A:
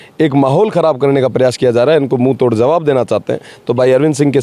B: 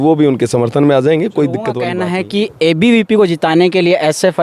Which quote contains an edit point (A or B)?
B